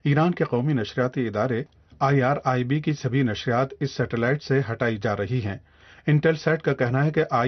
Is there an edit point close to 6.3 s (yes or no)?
no